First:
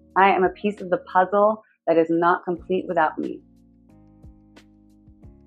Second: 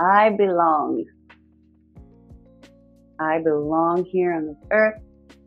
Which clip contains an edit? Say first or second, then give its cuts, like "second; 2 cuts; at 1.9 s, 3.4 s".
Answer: second; 2 cuts; at 1.1 s, 2.5 s